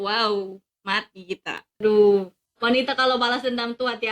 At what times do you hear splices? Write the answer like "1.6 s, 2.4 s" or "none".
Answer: 1.8 s